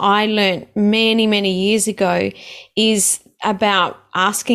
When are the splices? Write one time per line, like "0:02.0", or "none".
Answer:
none